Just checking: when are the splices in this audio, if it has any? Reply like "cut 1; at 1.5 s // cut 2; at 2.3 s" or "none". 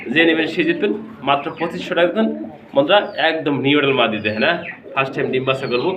none